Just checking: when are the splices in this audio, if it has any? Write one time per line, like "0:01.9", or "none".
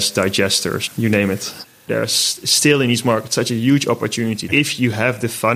0:01.8
0:04.4